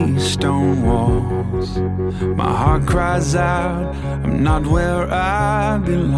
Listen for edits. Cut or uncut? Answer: uncut